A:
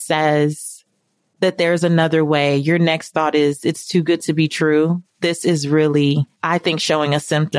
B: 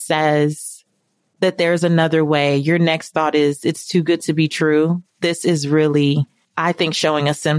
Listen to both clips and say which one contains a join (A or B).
A